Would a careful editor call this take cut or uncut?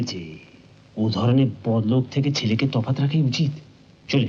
uncut